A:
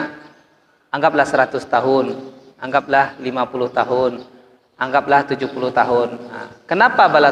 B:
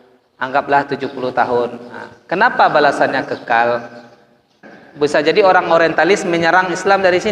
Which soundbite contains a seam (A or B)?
B